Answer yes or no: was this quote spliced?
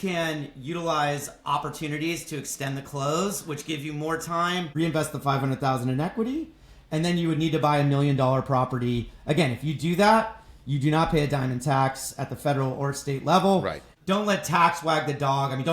yes